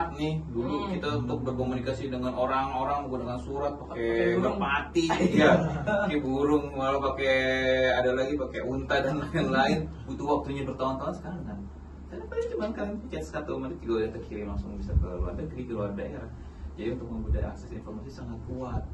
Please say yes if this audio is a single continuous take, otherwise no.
yes